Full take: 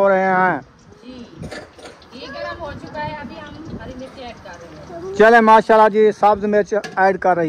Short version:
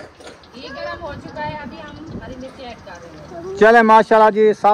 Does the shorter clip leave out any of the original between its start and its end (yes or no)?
no